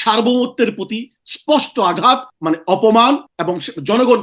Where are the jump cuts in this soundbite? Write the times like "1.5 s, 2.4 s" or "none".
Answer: 2.3 s, 3.3 s

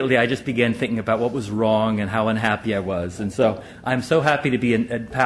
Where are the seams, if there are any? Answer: 3.6 s

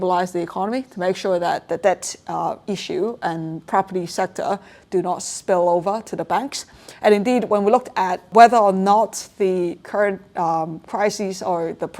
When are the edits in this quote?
1.6 s, 8.3 s

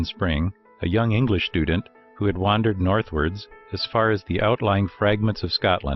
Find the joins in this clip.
4.1 s

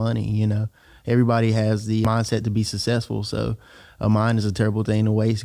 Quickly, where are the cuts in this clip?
2.0 s

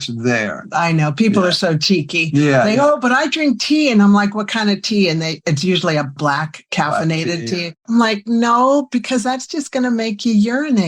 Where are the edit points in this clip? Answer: 6.1 s, 7.7 s

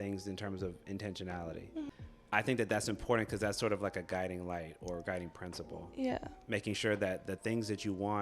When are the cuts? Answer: 1.9 s

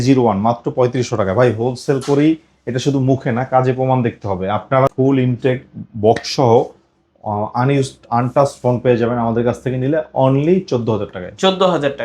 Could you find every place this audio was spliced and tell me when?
4.9 s

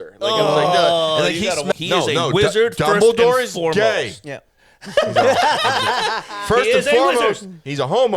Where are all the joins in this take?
1.7 s

